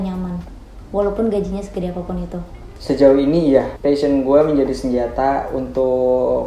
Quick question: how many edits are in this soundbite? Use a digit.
0